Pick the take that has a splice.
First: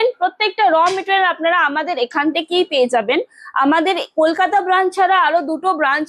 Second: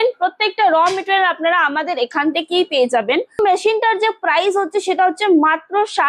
second; 1 cut; at 3.4 s

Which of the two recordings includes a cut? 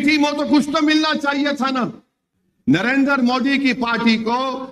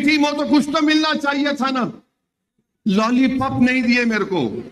first; 1 cut; at 2.5 s

